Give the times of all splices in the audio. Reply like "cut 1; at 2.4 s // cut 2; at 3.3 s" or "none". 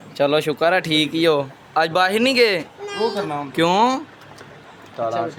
none